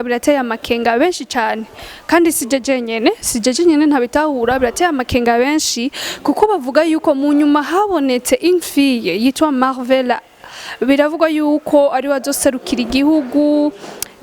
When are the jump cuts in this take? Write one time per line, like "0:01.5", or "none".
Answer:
none